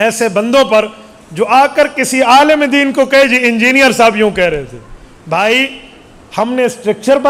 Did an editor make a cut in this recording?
no; 0 cuts

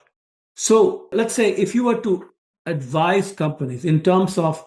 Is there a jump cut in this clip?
no; 0 cuts

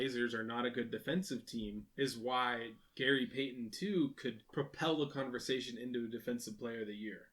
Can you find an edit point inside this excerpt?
yes; 2 cuts; at 1.8 s, 4.4 s

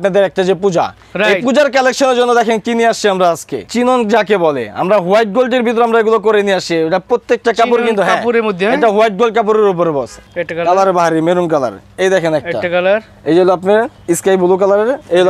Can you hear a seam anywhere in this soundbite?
yes; 2 cuts; at 3.6 s, 10.2 s

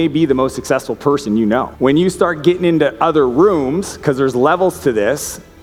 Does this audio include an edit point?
no; 0 cuts

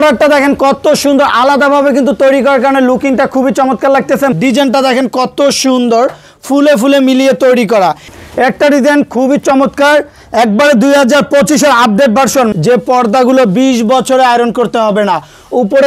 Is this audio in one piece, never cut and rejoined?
no; 3 cuts; at 4.3 s, 8.1 s, 12.5 s

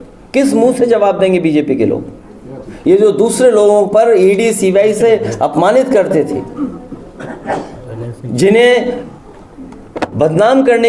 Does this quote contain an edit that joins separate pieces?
no; 0 cuts

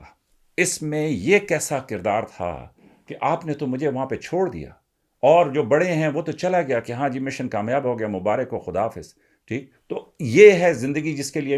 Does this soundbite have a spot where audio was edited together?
no; 0 cuts

